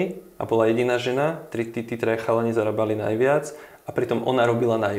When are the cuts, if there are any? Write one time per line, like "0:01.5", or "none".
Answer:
none